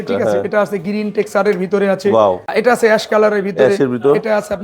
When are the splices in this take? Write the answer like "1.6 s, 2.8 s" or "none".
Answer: 2.5 s